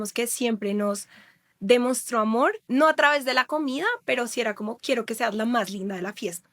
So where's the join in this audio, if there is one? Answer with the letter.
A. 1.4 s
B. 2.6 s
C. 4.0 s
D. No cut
B